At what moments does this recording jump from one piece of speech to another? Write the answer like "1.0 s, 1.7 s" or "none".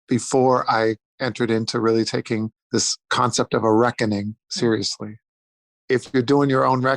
2.9 s, 4.4 s, 5.5 s

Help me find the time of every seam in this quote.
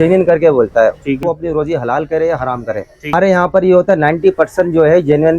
1.2 s, 3.1 s

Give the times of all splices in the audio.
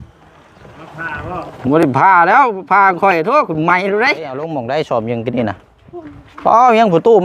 4.5 s

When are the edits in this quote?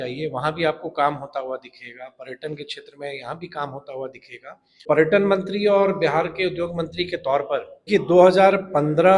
4.9 s, 7.9 s

